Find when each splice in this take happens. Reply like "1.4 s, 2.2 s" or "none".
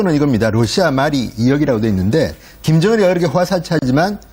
2.9 s